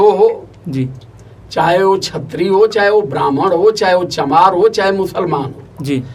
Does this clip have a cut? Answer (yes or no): no